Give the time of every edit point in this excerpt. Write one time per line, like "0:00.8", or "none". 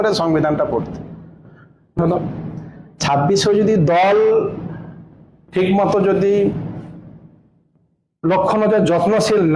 0:02.0